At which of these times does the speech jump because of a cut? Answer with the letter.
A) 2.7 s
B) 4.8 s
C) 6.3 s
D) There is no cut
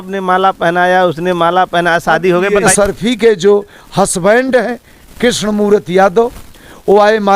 A